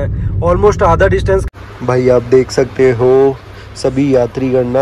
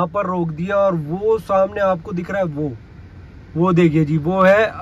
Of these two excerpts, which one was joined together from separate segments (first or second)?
first